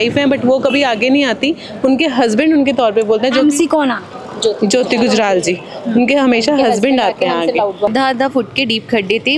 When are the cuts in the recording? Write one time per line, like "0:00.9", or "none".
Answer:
0:07.9